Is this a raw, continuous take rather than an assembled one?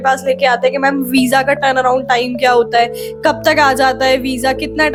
yes; 0 cuts

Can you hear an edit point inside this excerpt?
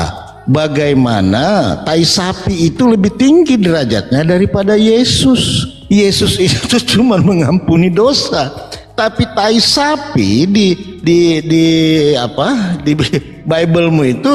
no; 0 cuts

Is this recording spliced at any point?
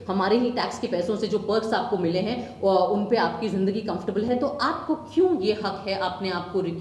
no; 0 cuts

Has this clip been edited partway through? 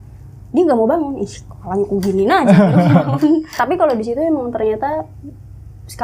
yes; 1 cut; at 3.5 s

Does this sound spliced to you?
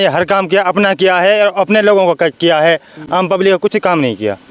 no; 0 cuts

